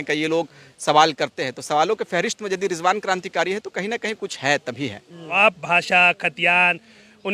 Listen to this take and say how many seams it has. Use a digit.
1